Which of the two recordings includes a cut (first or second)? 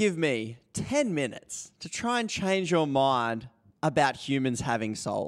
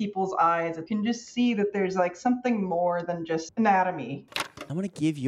second